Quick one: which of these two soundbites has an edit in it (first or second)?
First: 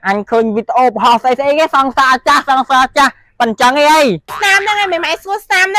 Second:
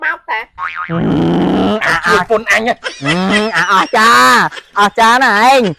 first